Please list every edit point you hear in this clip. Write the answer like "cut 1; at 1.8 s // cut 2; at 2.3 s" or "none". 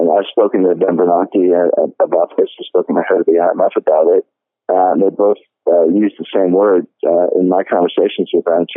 none